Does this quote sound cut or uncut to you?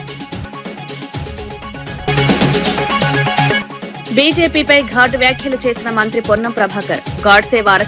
uncut